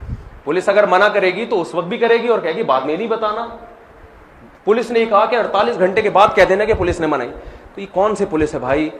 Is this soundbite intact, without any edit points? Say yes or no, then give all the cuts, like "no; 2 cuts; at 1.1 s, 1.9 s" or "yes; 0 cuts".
yes; 0 cuts